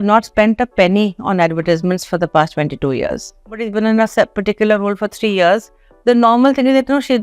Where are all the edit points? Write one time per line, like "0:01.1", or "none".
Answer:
0:03.6